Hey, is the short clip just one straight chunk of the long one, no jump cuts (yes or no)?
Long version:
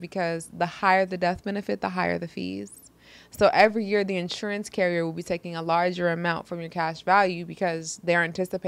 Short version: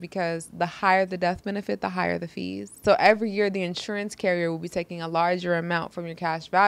no